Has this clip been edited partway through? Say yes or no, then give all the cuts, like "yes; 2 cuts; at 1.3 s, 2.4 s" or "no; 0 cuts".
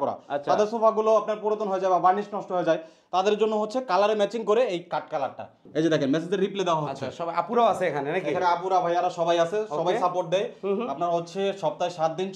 yes; 1 cut; at 5.6 s